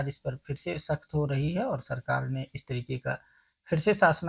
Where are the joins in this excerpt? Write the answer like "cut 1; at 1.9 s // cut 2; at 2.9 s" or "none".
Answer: none